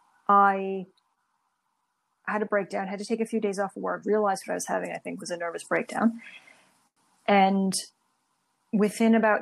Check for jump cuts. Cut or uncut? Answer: uncut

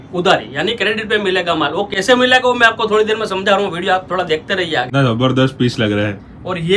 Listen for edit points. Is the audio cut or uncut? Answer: cut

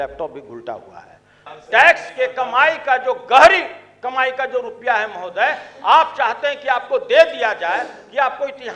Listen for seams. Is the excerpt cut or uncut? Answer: cut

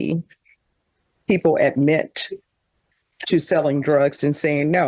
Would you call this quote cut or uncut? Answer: uncut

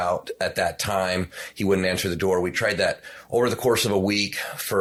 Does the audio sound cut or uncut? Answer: uncut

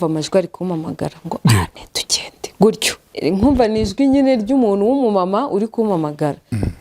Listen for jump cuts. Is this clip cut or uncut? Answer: cut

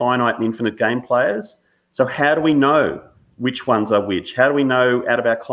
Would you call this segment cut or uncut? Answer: uncut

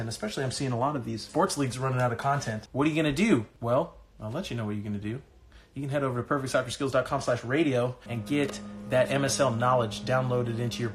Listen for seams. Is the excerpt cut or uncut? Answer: cut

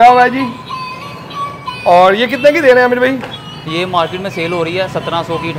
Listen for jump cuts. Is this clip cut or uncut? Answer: uncut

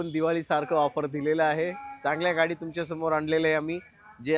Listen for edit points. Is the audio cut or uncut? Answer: uncut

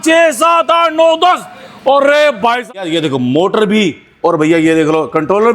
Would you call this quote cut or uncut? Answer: cut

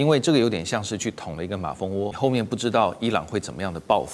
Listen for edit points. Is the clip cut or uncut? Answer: cut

